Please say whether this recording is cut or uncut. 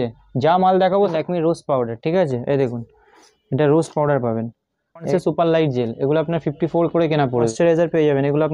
cut